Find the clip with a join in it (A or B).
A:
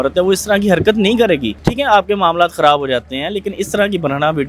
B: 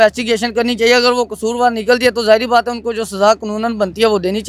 A